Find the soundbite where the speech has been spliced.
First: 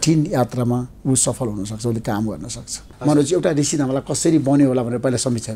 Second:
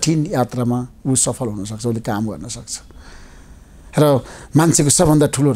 first; 1 cut; at 2.9 s

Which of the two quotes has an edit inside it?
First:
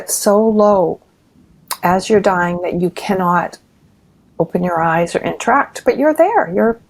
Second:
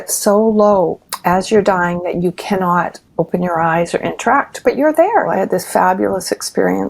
second; 3 cuts; at 1.1 s, 3.0 s, 5.3 s

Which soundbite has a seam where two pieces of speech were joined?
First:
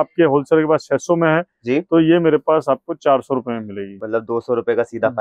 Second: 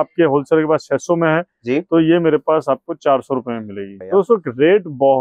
second; 1 cut; at 3.9 s

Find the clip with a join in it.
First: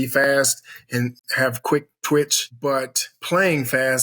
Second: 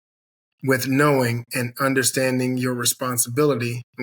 first; 1 cut; at 2.4 s

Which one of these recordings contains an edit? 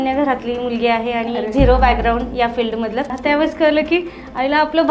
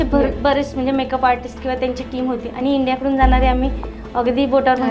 first; 1 cut; at 3.1 s

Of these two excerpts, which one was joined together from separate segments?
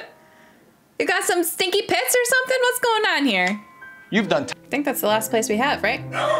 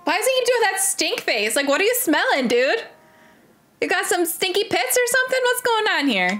first; 1 cut; at 4.5 s

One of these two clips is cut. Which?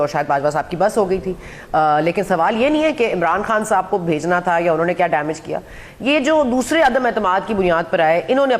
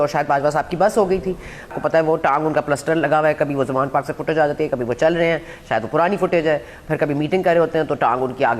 second; 1 cut; at 1.7 s

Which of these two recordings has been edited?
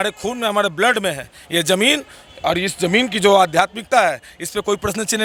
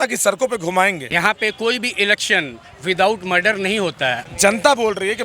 second; 2 cuts; at 1.0 s, 4.2 s

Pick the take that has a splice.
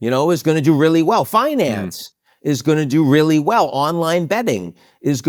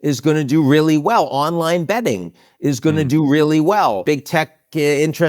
second; 1 cut; at 4.0 s

